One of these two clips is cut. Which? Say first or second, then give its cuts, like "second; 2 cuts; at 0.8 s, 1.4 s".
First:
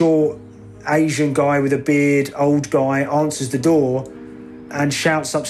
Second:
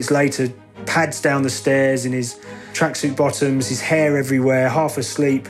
second; 1 cut; at 2.7 s